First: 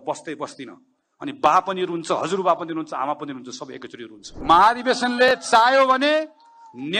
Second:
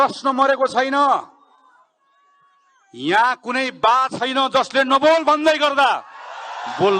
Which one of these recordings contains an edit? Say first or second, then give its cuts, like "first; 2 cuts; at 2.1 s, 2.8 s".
first; 1 cut; at 4.2 s